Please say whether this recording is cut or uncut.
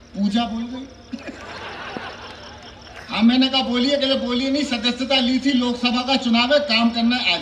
uncut